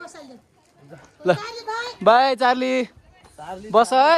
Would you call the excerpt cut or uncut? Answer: uncut